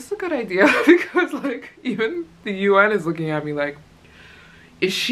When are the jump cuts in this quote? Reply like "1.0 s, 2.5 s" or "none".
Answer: none